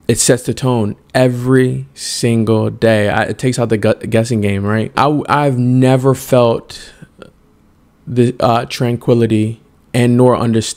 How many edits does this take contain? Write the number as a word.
one